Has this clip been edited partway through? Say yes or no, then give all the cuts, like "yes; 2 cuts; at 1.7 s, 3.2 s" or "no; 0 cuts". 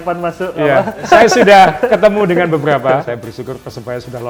yes; 2 cuts; at 1.0 s, 3.0 s